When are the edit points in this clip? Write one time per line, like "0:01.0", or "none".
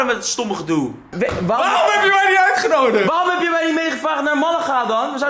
0:01.0